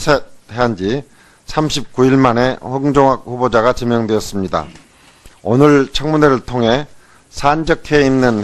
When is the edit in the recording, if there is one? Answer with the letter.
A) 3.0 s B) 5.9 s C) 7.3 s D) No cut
D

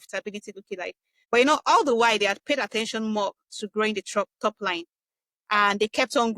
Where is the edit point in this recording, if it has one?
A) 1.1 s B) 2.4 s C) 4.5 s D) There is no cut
A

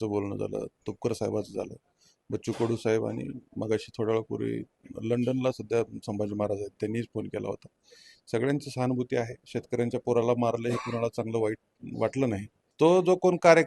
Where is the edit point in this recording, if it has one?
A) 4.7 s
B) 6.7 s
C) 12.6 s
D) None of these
C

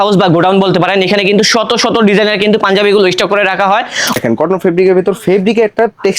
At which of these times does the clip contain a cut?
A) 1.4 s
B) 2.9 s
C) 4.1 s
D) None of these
C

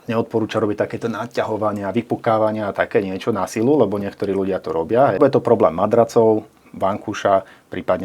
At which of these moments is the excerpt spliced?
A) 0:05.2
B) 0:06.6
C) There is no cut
A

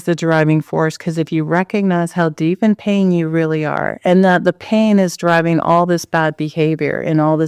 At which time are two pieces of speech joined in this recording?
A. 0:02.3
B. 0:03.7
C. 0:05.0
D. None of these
D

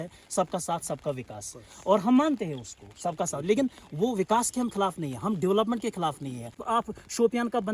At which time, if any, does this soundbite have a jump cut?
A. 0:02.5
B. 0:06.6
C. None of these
B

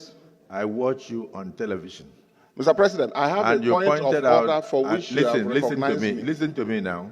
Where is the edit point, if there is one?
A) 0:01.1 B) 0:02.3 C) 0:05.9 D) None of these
D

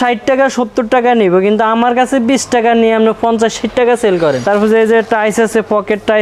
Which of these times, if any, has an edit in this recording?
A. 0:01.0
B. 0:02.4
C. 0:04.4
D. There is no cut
C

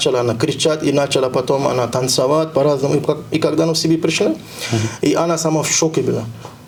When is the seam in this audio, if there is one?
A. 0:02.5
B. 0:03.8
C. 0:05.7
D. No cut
D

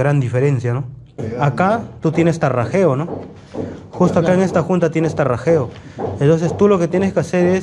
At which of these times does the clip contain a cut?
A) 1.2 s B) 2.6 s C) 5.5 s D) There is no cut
A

